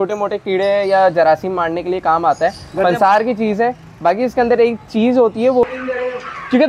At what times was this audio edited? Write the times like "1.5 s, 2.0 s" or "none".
5.6 s